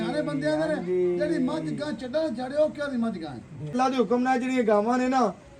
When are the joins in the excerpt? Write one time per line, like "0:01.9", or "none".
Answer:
0:03.8